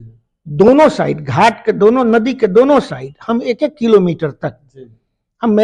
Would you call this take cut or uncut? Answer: uncut